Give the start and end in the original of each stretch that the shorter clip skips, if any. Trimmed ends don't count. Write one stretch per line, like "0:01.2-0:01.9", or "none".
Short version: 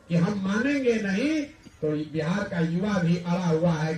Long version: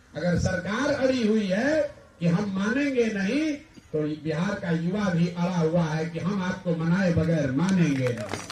none